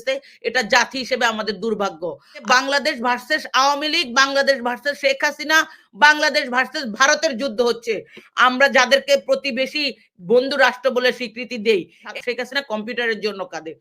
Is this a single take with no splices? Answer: no; 2 cuts; at 2.4 s, 12.1 s

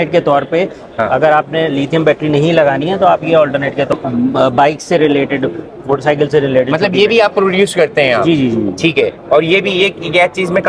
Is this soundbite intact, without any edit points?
no; 1 cut; at 3.9 s

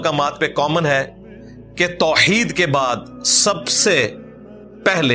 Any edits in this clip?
no; 0 cuts

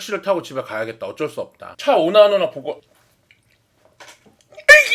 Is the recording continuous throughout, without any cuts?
no; 1 cut; at 1.7 s

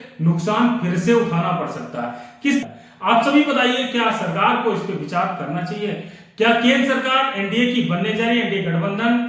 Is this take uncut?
no; 1 cut; at 2.6 s

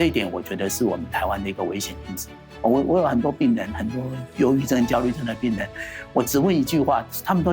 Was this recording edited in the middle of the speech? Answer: yes; 1 cut; at 2.4 s

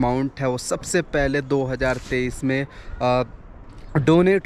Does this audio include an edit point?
no; 0 cuts

